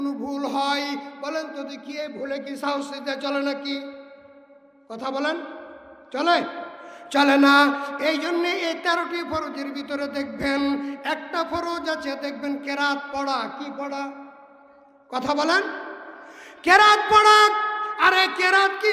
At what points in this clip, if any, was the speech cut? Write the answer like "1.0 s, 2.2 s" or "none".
none